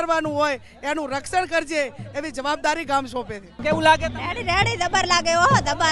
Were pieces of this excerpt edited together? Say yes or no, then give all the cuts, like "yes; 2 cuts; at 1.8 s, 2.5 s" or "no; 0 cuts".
yes; 1 cut; at 3.6 s